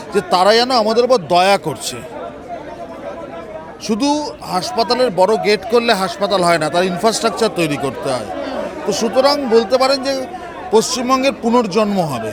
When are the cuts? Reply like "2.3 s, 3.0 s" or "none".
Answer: none